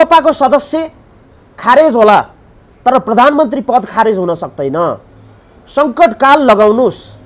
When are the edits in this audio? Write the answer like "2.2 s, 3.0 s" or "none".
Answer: none